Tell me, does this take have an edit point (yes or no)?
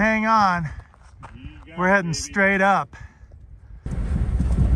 yes